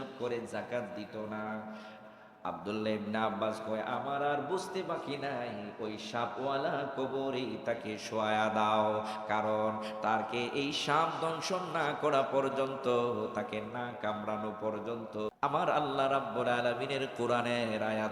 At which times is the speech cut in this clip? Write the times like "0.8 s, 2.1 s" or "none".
15.3 s